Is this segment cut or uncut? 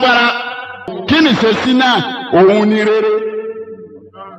cut